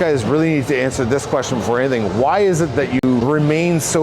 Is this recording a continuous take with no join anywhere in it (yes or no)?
no